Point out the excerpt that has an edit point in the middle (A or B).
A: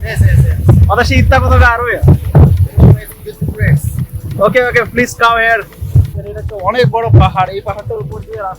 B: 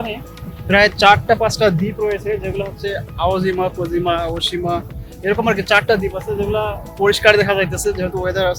A